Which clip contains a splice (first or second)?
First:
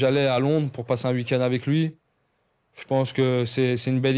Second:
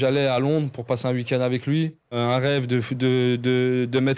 second